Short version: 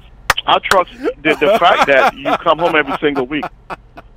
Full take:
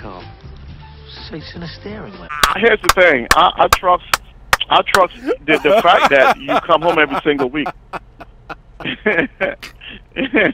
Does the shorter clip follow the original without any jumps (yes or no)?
yes